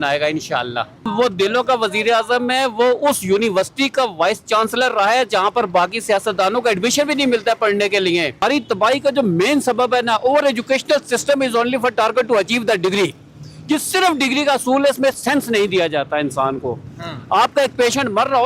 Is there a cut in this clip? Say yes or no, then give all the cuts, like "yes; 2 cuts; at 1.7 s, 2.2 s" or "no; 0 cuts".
yes; 2 cuts; at 1.1 s, 8.4 s